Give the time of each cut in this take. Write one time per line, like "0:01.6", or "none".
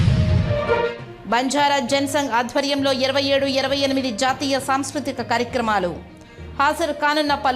0:01.0